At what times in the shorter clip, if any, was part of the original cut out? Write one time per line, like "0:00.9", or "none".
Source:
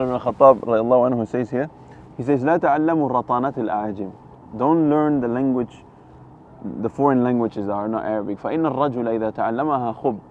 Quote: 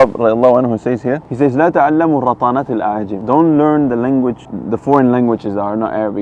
0:01.3
0:03.1
0:04.5